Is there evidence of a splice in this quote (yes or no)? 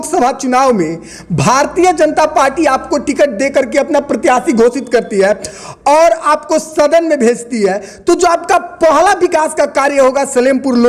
no